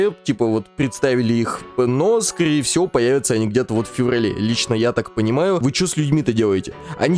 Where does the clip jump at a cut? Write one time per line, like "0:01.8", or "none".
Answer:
0:05.6